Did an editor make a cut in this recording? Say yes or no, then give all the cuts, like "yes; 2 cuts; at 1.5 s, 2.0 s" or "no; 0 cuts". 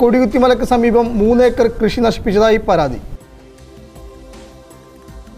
yes; 1 cut; at 3.1 s